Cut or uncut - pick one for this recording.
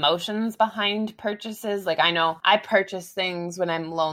cut